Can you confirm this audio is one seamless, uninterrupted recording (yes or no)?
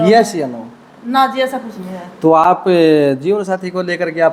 yes